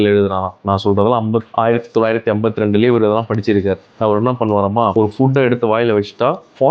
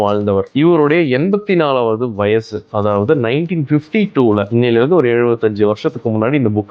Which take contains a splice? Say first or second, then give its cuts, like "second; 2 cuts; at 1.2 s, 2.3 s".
first; 1 cut; at 4.9 s